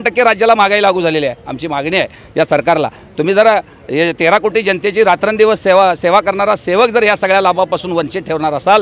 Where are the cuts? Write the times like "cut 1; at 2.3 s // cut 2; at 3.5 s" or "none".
none